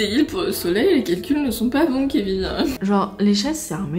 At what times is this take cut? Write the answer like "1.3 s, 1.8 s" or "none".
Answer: 2.8 s